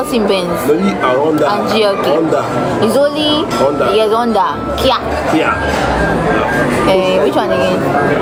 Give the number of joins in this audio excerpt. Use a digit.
0